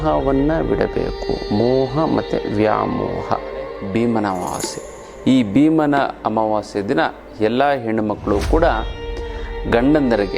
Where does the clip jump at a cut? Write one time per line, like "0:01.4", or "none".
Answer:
0:03.7